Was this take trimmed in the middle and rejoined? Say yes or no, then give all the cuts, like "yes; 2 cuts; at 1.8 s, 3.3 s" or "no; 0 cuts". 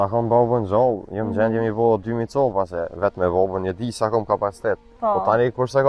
no; 0 cuts